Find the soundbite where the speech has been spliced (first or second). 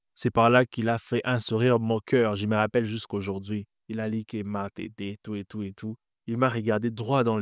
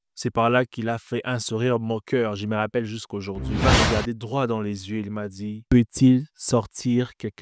second